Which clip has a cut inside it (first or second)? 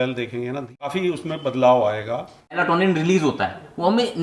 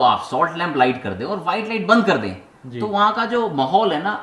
first